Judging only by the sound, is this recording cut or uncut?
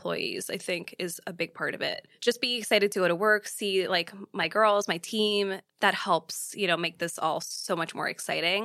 cut